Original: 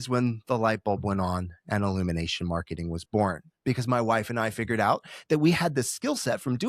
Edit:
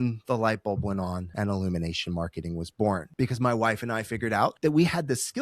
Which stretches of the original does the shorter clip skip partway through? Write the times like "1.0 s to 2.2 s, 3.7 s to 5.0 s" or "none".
1.5 s to 1.6 s, 3.4 s to 3.5 s, 5.0 s to 5.2 s